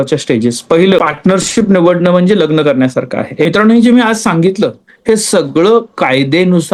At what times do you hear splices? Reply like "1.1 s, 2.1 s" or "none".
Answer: 1.0 s, 3.5 s